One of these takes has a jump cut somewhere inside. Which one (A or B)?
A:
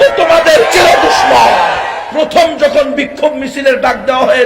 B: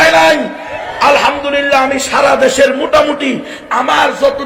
A